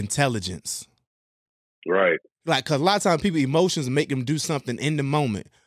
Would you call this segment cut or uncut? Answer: cut